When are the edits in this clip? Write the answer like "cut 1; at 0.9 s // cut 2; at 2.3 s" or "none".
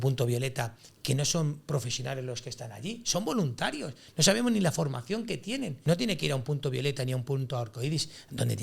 cut 1; at 5.7 s